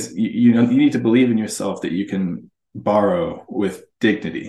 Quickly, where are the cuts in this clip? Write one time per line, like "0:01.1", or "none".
none